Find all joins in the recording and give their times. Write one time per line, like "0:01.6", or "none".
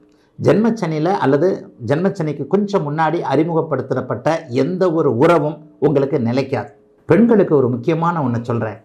0:06.9